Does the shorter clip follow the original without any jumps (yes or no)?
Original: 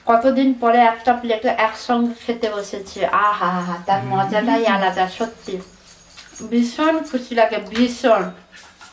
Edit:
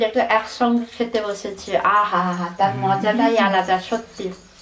yes